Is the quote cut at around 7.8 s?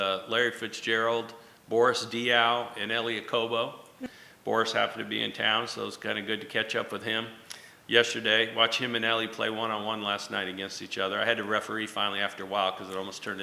no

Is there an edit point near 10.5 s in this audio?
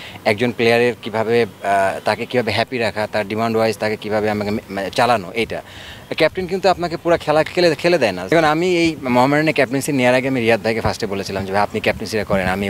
no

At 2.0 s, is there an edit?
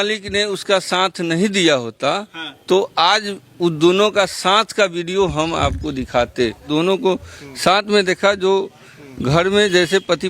no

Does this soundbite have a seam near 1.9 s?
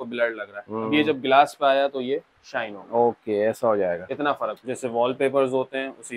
no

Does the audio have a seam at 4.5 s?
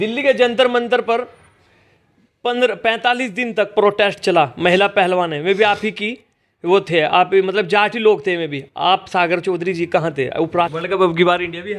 no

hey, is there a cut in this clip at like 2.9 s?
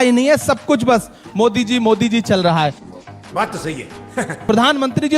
yes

